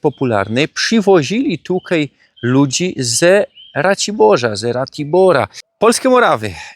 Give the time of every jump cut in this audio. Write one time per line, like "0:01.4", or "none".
0:05.6